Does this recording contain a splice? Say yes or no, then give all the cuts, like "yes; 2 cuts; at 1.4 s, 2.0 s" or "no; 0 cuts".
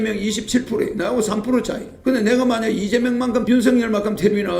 yes; 2 cuts; at 1.8 s, 3.4 s